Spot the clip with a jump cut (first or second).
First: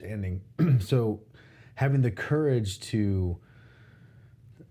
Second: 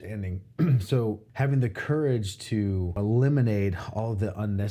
second